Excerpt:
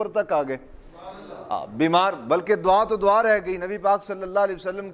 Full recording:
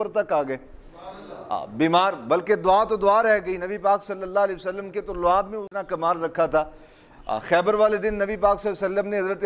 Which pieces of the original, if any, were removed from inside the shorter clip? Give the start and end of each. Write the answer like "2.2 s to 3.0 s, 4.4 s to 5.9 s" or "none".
none